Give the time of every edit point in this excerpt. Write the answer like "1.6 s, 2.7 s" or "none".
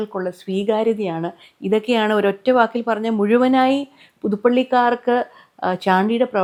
none